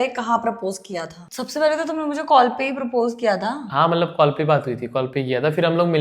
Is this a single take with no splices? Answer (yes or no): yes